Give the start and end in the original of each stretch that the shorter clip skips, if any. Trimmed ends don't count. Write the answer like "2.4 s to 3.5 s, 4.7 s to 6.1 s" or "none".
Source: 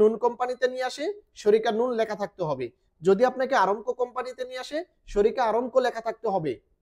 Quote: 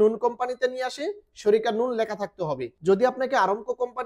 2.7 s to 2.9 s